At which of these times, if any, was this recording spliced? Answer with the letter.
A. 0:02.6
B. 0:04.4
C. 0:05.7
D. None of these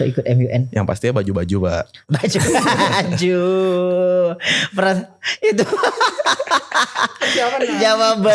D